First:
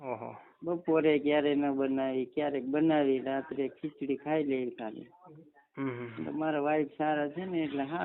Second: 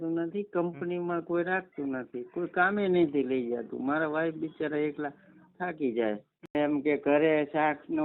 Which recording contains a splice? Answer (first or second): second